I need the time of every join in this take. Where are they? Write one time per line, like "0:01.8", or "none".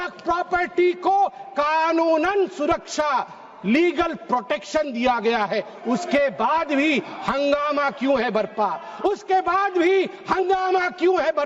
none